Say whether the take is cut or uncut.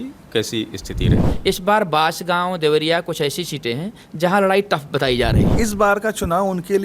cut